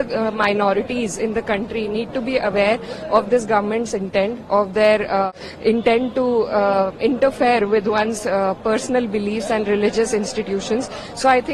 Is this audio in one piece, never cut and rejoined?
no; 1 cut; at 5.3 s

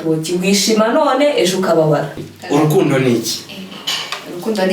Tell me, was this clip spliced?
yes; 1 cut; at 2.2 s

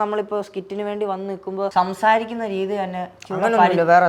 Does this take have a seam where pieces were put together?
yes; 1 cut; at 1.7 s

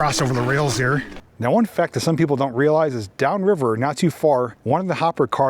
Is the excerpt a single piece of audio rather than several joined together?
no; 2 cuts; at 1.1 s, 4.6 s

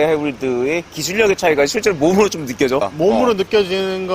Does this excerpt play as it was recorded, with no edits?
no; 1 cut; at 2.9 s

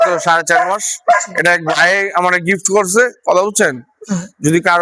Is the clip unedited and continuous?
yes; 0 cuts

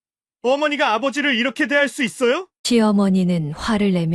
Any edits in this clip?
no; 0 cuts

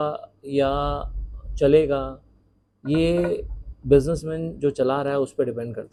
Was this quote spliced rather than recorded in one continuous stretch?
no; 0 cuts

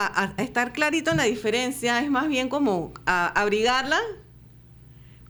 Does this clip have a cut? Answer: no; 0 cuts

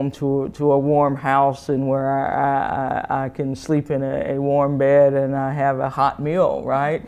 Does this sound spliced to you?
no; 0 cuts

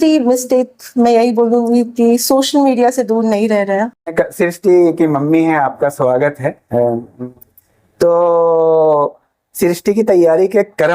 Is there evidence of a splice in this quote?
yes; 1 cut; at 4.1 s

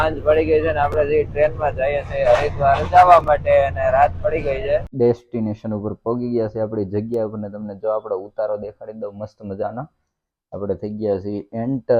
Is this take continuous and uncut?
no; 1 cut; at 4.9 s

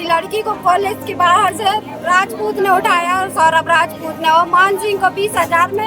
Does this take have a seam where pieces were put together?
no; 0 cuts

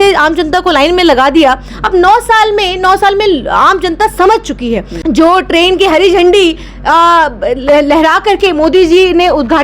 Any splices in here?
yes; 1 cut; at 4.9 s

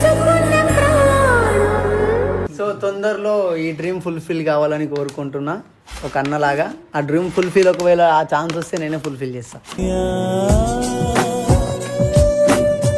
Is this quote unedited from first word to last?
yes; 0 cuts

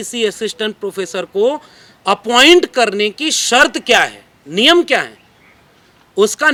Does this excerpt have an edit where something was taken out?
no; 0 cuts

